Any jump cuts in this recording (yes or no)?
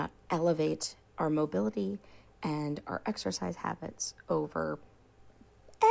yes